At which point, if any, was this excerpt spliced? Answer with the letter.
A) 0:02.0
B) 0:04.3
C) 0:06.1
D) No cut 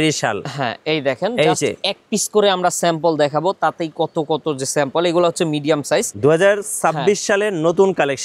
C